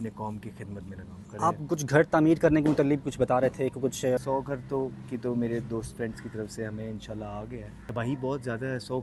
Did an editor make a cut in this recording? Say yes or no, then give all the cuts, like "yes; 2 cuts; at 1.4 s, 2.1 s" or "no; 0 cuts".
yes; 3 cuts; at 1.3 s, 4.2 s, 7.7 s